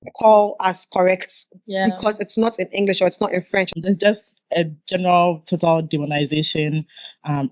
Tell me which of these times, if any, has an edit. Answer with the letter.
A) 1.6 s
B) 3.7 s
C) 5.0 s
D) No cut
B